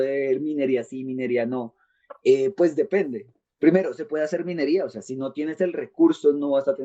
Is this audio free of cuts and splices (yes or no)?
yes